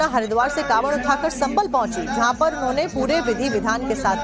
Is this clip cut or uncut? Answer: uncut